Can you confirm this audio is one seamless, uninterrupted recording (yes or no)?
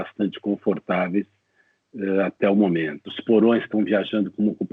no